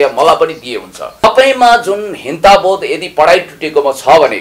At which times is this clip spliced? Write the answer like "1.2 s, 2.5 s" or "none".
1.2 s